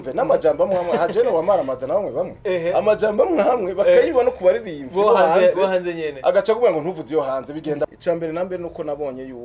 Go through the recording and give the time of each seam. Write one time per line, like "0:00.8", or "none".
0:08.0